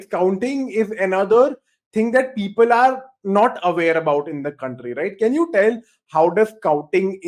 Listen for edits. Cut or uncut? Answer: uncut